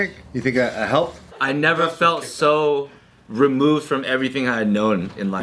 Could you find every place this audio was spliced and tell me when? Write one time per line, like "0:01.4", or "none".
0:01.2